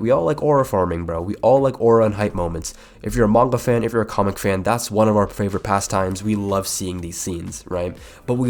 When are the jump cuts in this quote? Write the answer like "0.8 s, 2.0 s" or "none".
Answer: none